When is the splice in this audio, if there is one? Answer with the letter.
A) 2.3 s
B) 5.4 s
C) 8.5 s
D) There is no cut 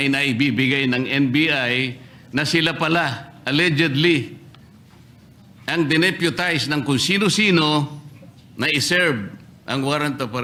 D